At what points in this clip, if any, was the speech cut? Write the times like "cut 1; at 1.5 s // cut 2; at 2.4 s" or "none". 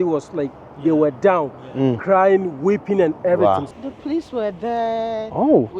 cut 1; at 3.7 s